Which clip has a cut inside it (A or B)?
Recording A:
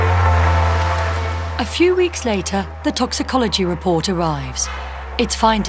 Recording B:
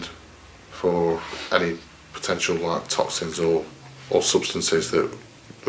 B